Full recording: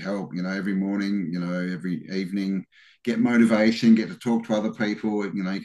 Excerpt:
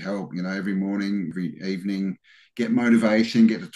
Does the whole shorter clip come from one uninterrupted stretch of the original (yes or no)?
no